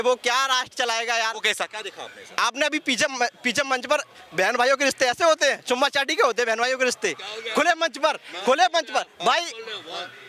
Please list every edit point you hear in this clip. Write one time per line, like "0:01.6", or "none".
none